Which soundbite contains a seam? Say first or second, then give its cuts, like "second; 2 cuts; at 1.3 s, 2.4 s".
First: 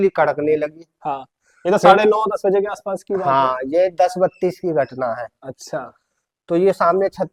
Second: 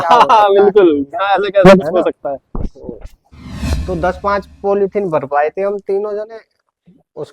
second; 1 cut; at 3.7 s